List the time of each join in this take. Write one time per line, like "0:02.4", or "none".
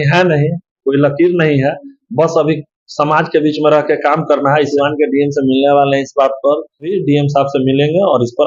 0:04.7
0:07.0